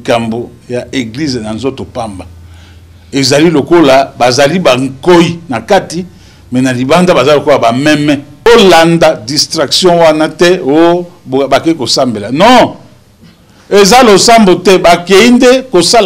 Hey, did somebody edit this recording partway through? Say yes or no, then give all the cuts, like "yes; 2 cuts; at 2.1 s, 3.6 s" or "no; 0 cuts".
yes; 1 cut; at 8.5 s